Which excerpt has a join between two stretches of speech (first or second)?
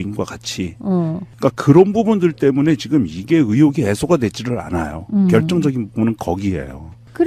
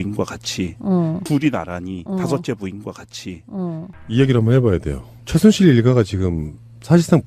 second